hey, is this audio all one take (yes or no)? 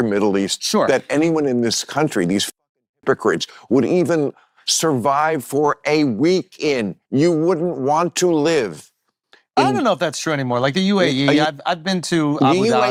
yes